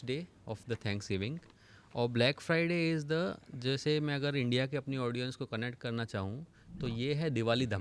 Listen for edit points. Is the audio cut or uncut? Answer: uncut